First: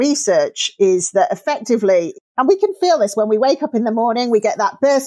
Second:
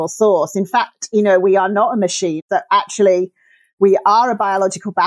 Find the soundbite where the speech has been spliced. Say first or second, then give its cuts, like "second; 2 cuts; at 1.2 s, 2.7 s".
second; 1 cut; at 2.4 s